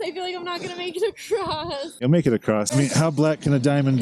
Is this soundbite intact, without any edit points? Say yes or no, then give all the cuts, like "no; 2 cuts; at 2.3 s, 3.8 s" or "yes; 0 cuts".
no; 1 cut; at 2.7 s